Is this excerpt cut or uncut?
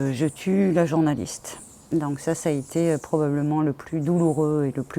uncut